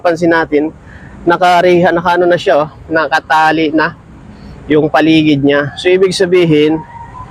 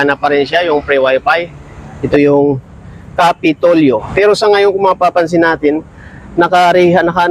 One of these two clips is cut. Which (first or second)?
second